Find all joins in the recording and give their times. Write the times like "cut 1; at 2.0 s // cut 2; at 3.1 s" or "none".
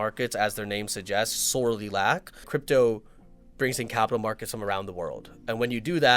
cut 1; at 2.5 s